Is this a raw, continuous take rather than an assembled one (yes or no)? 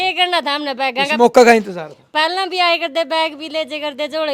yes